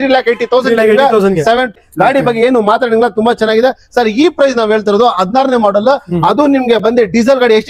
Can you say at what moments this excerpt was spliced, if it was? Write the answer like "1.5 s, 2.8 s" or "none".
1.7 s